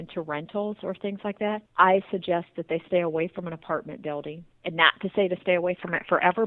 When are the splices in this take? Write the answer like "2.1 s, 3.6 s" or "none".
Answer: 1.7 s, 4.5 s